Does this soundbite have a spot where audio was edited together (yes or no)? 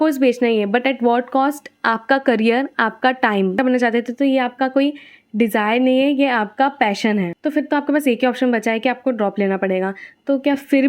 yes